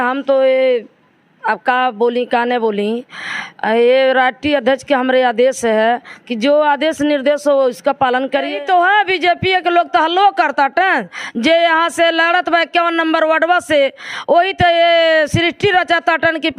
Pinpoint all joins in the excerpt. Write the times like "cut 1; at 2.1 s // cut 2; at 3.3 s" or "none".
cut 1; at 8.5 s